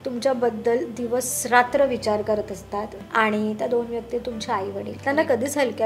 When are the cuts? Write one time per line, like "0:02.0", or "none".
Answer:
0:03.0
0:04.9

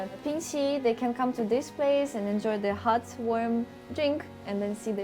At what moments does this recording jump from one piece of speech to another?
none

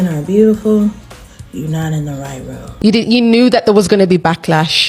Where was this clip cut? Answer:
0:02.6

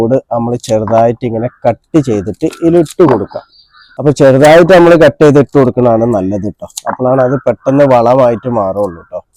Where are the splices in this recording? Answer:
none

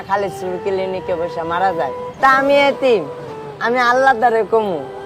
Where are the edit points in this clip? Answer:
0:02.0

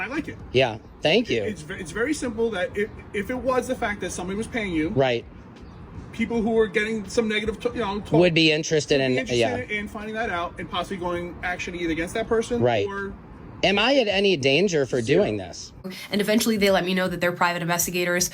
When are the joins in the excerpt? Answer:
0:15.9

